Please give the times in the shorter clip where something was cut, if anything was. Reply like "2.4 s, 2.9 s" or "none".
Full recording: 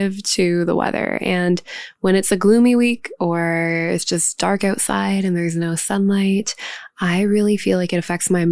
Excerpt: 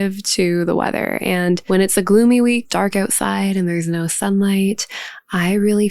1.6 s, 2.7 s